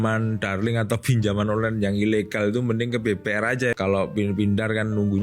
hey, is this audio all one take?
no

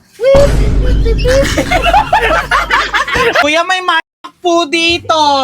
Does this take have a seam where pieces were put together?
yes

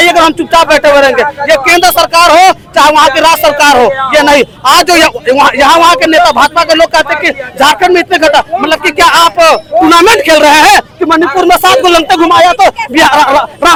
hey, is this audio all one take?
yes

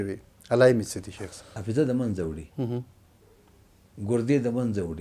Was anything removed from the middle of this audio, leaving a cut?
yes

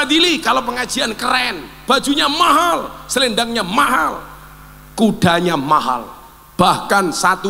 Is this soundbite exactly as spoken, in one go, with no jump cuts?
yes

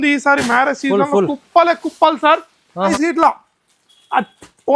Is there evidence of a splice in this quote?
yes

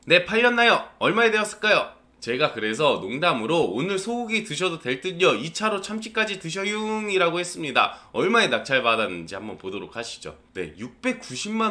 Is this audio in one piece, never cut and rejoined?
yes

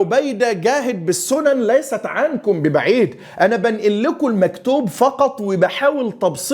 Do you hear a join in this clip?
no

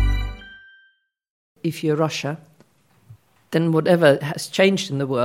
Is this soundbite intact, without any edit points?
no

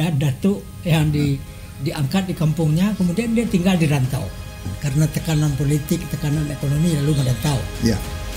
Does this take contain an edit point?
yes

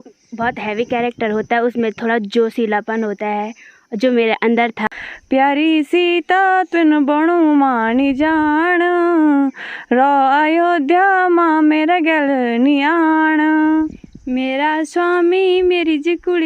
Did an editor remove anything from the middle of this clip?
yes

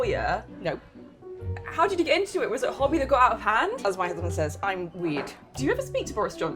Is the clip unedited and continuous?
no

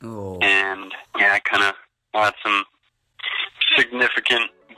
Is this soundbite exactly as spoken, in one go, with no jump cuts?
no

